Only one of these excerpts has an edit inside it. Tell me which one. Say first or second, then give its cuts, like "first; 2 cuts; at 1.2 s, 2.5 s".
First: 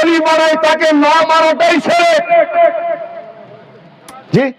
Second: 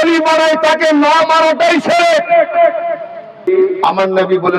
second; 1 cut; at 3.4 s